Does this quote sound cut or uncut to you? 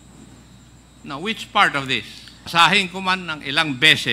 cut